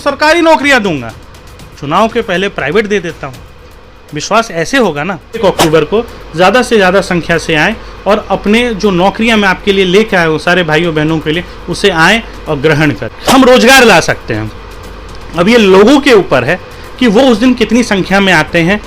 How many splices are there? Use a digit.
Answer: 2